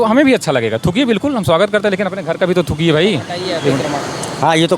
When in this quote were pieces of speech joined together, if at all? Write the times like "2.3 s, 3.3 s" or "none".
3.8 s